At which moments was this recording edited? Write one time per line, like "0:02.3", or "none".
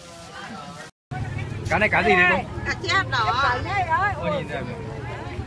0:01.1